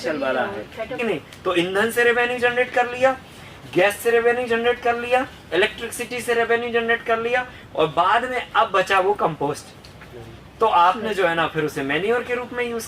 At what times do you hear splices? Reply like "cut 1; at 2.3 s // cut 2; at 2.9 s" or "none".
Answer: cut 1; at 1.0 s